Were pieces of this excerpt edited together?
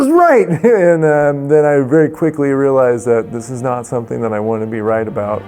no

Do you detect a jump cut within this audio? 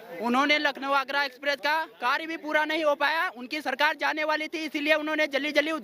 no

